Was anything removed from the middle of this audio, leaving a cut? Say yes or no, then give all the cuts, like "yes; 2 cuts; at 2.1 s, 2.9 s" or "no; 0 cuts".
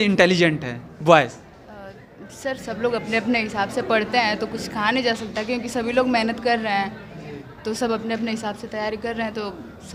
no; 0 cuts